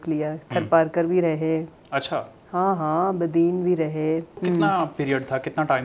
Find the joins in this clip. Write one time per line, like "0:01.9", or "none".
0:04.4